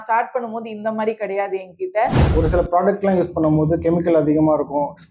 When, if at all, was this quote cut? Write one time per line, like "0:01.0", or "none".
0:02.2